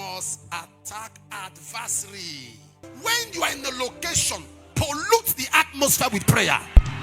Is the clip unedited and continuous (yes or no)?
no